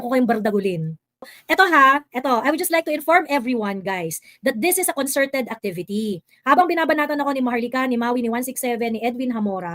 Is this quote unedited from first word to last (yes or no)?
no